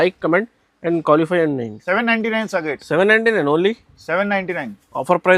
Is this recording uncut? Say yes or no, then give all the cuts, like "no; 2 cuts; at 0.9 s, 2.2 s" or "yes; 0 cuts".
no; 1 cut; at 1.7 s